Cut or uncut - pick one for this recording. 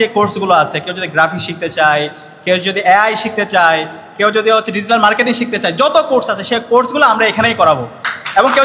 uncut